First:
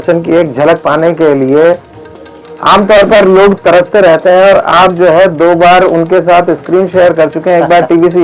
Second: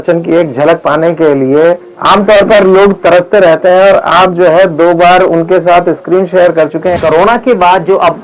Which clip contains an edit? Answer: second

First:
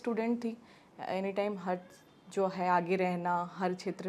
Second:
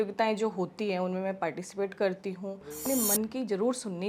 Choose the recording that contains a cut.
second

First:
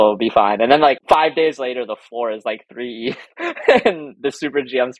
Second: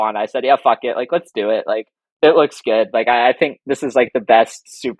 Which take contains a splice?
first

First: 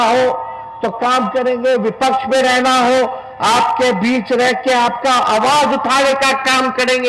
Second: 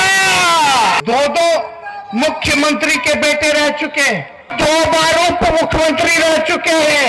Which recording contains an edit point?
second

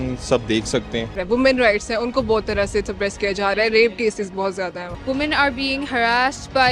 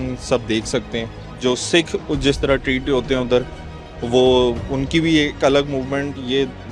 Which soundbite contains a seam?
first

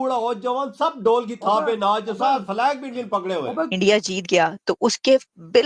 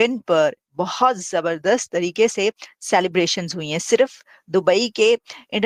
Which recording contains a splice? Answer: first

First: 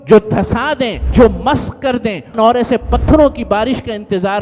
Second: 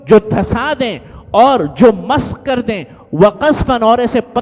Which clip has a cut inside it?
first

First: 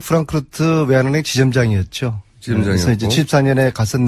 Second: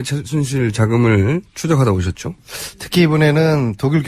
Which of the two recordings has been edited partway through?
first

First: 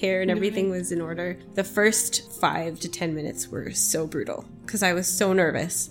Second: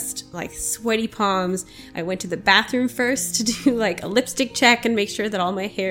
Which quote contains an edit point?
first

